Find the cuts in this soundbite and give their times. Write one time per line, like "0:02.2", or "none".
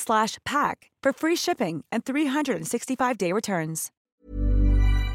0:03.9